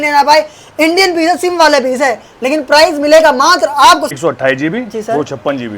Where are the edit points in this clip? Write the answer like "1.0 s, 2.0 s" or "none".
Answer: 4.2 s